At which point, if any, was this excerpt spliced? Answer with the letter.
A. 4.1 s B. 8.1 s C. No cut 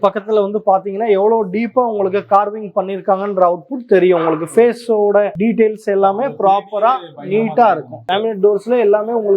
B